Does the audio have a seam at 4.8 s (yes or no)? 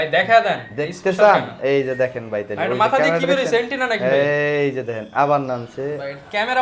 no